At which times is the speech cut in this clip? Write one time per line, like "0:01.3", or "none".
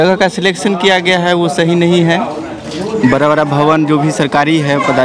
none